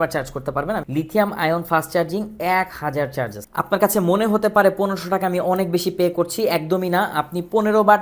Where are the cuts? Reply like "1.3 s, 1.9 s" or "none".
none

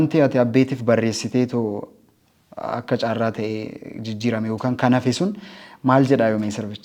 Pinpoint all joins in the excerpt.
none

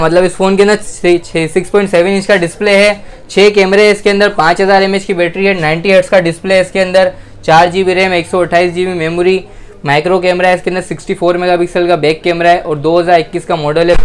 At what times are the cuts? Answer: none

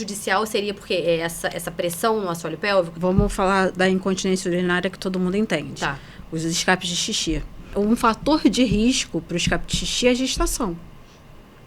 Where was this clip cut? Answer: 2.9 s, 7.7 s

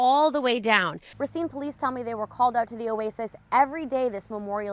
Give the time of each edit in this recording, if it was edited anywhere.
1.0 s

